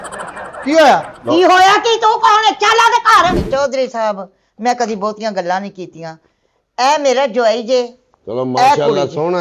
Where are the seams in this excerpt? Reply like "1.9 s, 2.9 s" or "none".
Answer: 3.4 s